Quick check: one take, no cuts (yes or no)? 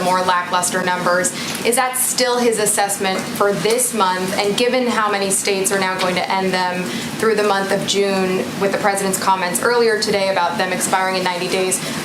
yes